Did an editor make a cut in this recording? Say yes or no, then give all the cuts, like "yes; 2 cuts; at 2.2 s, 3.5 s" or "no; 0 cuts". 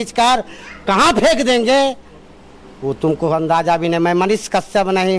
no; 0 cuts